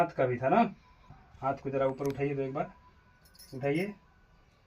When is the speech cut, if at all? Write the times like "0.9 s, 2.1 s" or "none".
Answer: 1.1 s